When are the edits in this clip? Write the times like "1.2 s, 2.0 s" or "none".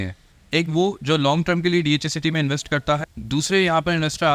3.0 s